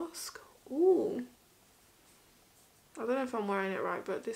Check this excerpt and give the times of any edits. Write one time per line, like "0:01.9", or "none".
none